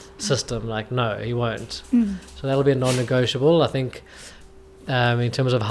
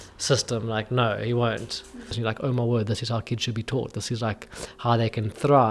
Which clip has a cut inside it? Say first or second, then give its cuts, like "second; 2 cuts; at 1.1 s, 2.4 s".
second; 1 cut; at 1.9 s